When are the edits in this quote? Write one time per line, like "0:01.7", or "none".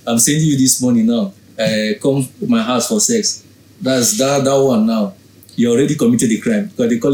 none